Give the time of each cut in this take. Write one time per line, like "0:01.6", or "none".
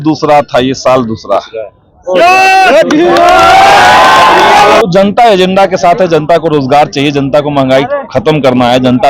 0:04.8